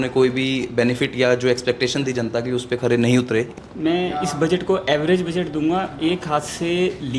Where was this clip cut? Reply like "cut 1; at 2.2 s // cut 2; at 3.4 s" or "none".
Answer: cut 1; at 3.6 s